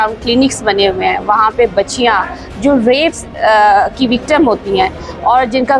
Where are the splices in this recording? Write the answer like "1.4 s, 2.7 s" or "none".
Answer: none